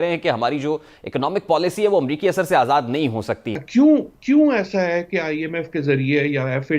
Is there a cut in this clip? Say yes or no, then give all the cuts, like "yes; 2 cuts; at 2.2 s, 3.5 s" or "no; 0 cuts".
yes; 1 cut; at 3.5 s